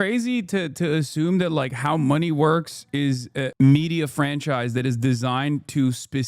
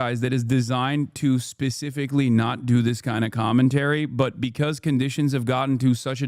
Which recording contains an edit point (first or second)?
first